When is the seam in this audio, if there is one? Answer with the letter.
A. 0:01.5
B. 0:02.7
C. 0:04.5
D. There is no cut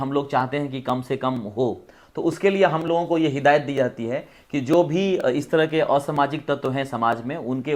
D